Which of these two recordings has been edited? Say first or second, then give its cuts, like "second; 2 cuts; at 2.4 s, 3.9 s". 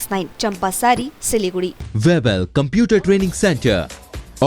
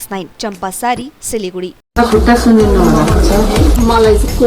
first; 1 cut; at 1.8 s